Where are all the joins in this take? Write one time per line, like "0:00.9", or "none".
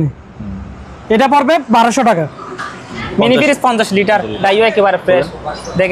0:03.0